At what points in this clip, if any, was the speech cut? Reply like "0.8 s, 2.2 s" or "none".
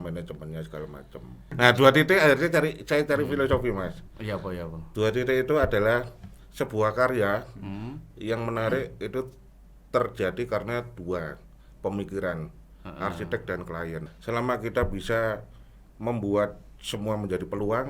1.5 s, 14.1 s